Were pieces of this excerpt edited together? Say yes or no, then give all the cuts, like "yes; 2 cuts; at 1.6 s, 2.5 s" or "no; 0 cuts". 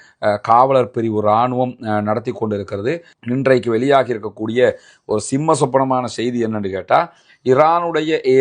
yes; 1 cut; at 3.2 s